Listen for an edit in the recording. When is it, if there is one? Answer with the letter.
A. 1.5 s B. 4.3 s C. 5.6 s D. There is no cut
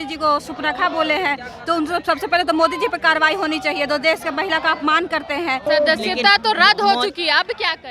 C